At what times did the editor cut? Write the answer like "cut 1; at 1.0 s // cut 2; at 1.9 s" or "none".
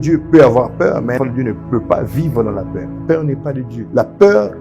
cut 1; at 1.2 s // cut 2; at 2.9 s // cut 3; at 3.8 s